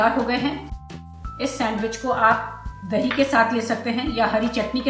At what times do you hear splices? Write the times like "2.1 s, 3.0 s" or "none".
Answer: 0.9 s